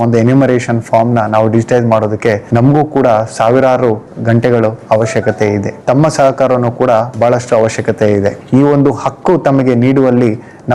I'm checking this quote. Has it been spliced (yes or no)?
yes